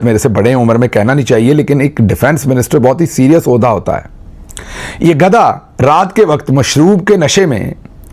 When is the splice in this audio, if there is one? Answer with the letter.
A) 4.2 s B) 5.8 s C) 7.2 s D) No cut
D